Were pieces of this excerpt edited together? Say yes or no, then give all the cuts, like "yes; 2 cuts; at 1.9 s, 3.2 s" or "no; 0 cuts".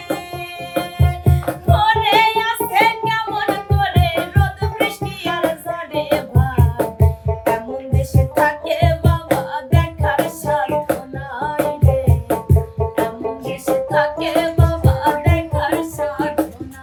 no; 0 cuts